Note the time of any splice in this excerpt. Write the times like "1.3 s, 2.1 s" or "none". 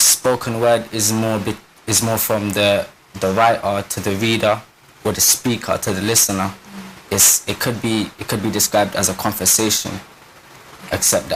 9.9 s